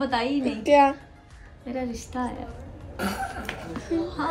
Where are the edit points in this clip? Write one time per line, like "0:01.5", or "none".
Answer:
none